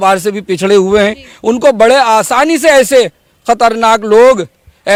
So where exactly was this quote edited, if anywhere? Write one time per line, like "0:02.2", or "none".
none